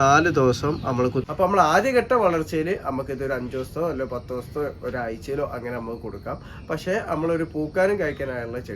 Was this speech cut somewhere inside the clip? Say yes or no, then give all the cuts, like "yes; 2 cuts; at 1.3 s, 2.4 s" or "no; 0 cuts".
yes; 1 cut; at 1.2 s